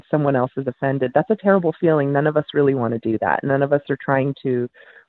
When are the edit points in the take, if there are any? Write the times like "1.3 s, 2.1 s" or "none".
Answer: none